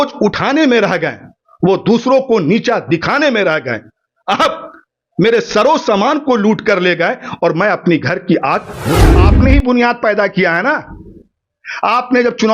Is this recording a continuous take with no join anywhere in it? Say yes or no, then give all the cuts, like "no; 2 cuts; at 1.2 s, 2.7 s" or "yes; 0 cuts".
no; 1 cut; at 9.1 s